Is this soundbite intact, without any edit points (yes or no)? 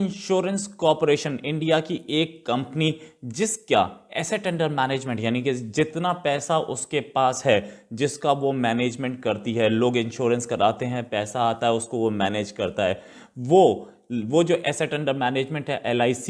yes